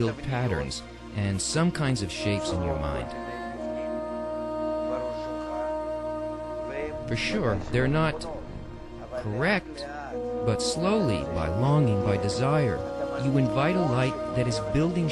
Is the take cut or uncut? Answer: uncut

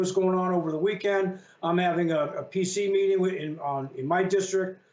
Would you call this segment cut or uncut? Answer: uncut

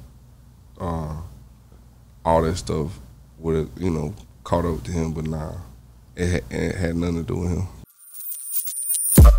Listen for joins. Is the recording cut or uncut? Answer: cut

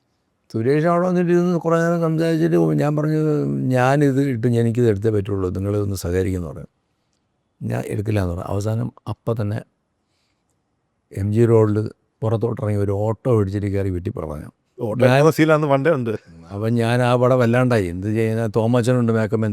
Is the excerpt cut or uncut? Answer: uncut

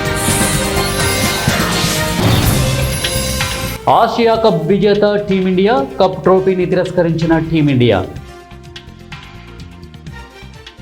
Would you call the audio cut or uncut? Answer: cut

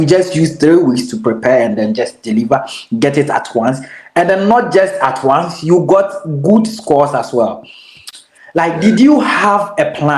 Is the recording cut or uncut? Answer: uncut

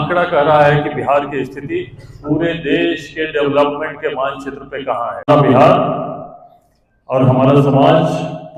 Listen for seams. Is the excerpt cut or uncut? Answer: uncut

